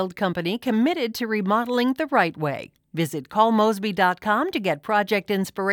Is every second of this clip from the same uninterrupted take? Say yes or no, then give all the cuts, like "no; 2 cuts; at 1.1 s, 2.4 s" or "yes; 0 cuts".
yes; 0 cuts